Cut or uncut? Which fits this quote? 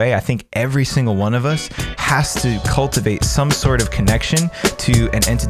uncut